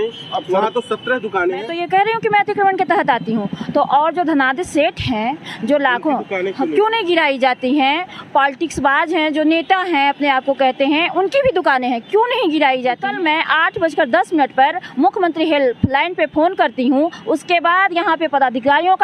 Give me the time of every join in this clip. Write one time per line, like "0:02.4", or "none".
0:01.7
0:13.0

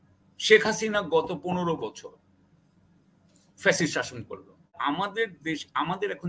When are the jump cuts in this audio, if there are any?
0:04.8

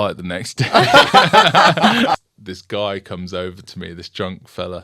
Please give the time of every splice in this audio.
0:02.2

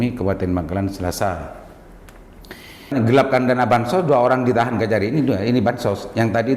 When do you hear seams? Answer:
0:02.9

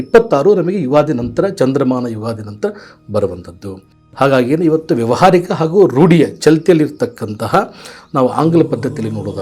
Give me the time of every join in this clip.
none

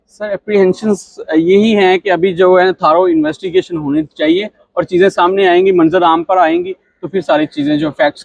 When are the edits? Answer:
none

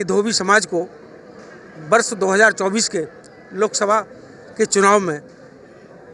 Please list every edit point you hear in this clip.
none

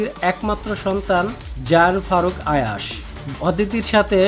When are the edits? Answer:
0:03.2

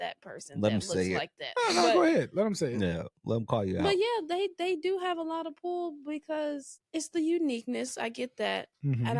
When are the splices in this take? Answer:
0:06.7

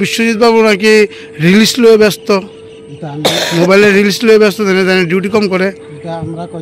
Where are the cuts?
none

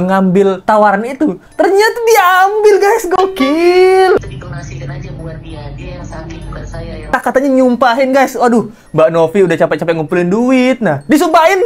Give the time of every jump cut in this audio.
0:04.2
0:07.1

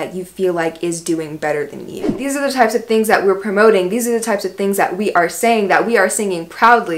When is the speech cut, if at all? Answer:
0:02.1

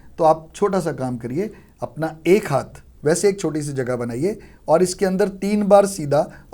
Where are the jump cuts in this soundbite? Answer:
0:02.8

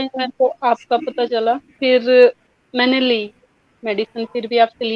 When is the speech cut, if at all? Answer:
0:01.8

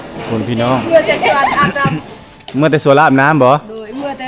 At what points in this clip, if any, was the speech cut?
none

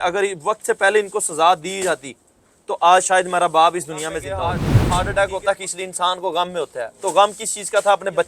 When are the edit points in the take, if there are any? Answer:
0:04.8

